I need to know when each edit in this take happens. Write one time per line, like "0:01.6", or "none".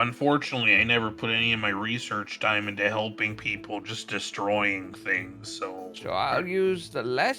0:05.9